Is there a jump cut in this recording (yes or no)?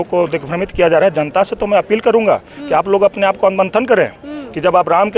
no